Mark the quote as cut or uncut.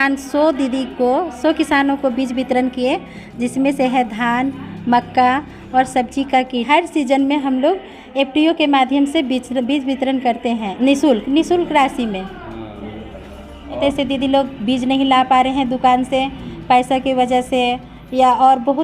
cut